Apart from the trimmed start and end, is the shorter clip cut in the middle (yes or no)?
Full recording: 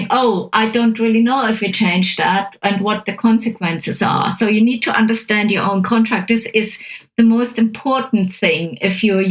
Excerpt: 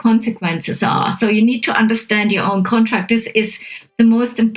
no